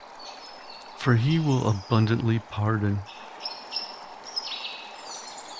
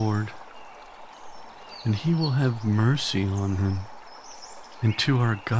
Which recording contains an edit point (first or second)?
first